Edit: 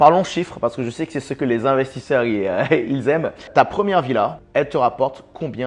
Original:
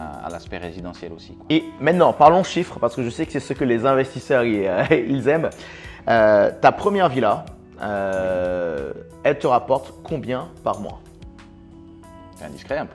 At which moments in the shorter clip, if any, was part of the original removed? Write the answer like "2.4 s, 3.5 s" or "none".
3.5 s, 4.4 s